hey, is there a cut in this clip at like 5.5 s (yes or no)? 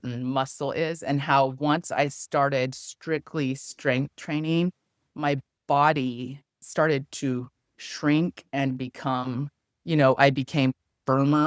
yes